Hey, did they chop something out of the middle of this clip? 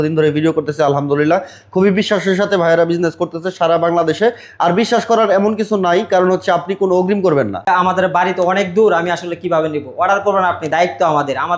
yes; 1 cut; at 7.7 s

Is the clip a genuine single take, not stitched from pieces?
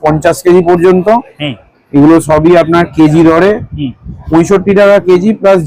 yes; 0 cuts

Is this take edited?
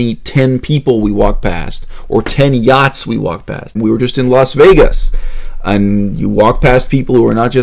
yes; 1 cut; at 3.7 s

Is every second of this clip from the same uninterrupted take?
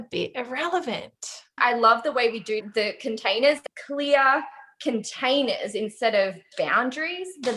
no; 3 cuts; at 1.6 s, 2.7 s, 3.6 s

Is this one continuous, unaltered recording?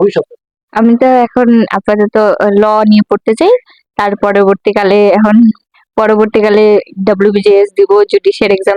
yes; 0 cuts

